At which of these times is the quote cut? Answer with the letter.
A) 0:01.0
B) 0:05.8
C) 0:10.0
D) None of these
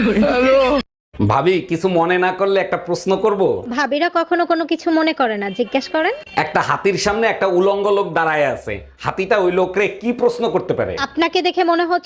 A